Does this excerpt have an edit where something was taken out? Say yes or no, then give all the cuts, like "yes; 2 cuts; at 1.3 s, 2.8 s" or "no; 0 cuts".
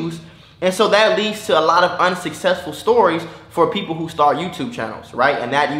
no; 0 cuts